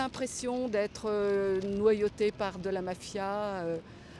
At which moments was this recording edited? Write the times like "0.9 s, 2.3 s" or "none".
none